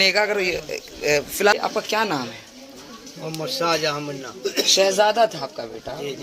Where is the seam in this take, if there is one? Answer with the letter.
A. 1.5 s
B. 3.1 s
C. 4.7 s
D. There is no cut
A